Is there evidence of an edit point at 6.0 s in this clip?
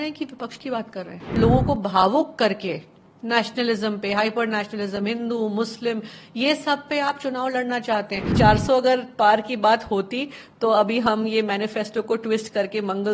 no; 2 cuts; at 1.3 s, 8.3 s

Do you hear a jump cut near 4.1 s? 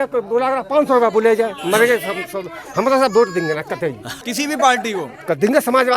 yes; 1 cut; at 4.1 s

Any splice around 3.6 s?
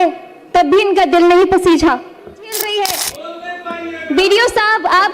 no; 1 cut; at 2.1 s

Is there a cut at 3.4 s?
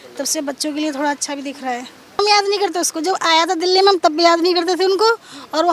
no; 1 cut; at 2.2 s

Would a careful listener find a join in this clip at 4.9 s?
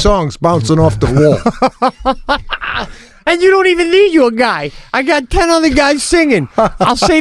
no; 1 cut; at 1.1 s

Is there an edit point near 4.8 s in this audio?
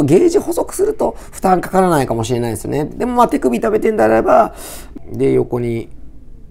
yes; 1 cut; at 4.8 s

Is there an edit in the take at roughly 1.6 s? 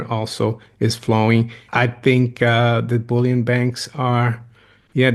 yes; 1 cut; at 1.6 s

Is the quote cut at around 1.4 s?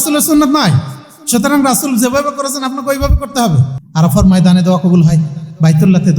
no; 1 cut; at 3.8 s

